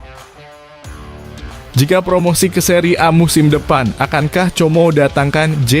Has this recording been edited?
yes; 1 cut; at 1.7 s

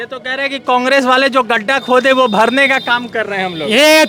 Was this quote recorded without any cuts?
yes; 0 cuts

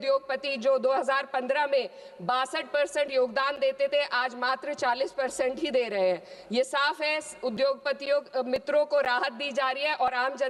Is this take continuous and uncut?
yes; 0 cuts

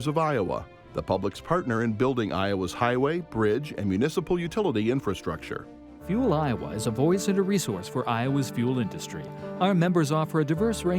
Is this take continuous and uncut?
yes; 0 cuts

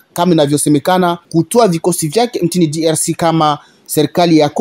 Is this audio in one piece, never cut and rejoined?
no; 1 cut; at 1.2 s

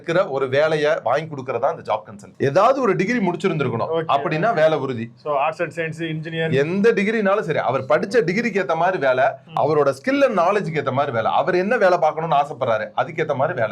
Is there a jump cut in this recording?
yes; 1 cut; at 2.3 s

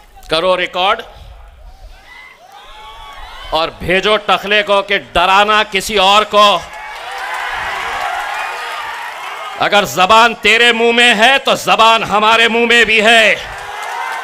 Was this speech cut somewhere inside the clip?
no; 0 cuts

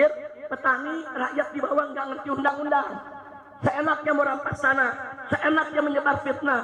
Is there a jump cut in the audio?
no; 0 cuts

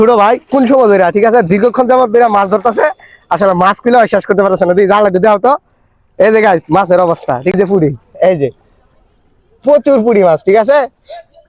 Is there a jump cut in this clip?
no; 0 cuts

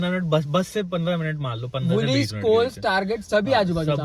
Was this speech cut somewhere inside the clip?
no; 0 cuts

